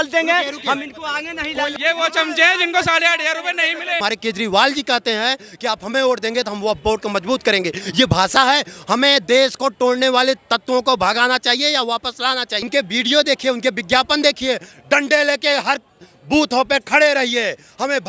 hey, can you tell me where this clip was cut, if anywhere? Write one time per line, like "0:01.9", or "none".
0:01.7
0:04.0
0:12.6